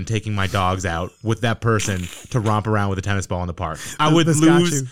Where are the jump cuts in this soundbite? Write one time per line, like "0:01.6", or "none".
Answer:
none